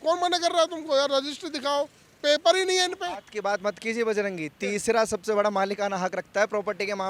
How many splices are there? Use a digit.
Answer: 0